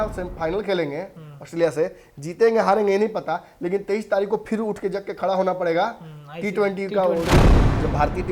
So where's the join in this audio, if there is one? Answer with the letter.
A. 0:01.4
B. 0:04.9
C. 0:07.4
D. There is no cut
C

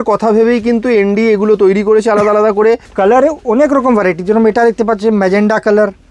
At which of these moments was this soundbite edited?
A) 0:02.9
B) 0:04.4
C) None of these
A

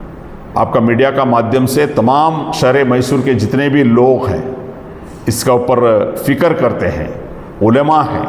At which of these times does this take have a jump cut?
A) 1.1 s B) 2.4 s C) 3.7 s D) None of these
D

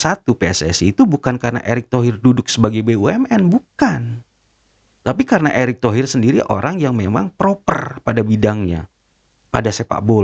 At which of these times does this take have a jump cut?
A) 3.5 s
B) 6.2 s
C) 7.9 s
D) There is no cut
D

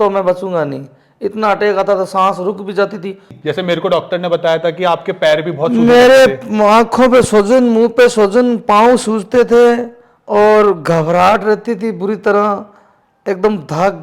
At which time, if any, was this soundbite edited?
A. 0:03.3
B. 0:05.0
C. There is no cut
A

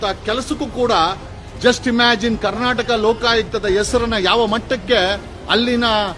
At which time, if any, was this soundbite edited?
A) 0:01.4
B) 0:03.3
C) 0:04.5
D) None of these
A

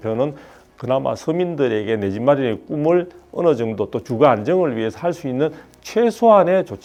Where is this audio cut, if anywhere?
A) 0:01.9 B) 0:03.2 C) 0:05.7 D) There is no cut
D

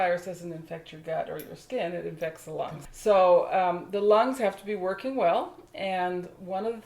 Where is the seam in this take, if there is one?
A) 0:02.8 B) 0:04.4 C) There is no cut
A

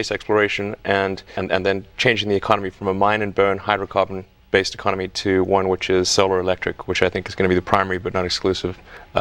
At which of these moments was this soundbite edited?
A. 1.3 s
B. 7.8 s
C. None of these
A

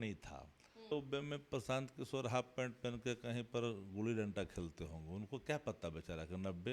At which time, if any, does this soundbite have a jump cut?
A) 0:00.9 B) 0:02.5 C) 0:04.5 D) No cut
A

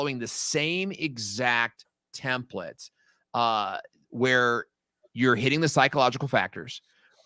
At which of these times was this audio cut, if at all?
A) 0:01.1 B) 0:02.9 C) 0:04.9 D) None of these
D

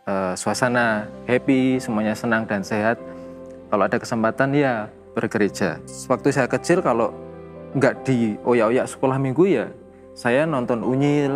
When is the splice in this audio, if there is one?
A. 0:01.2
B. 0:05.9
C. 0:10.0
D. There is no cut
B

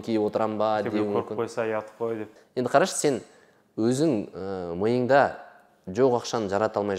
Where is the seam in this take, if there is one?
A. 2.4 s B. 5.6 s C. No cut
A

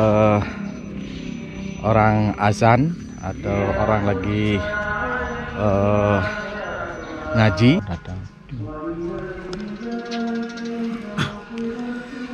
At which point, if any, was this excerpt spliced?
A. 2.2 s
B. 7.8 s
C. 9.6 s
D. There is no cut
B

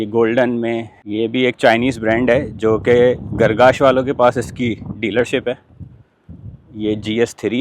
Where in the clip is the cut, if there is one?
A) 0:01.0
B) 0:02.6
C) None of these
A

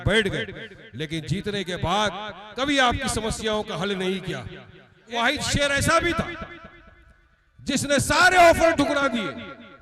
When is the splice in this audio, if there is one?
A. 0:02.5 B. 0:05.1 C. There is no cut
B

